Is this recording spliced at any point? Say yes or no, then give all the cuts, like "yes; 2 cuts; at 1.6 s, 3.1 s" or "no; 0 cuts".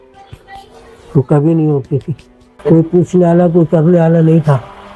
no; 0 cuts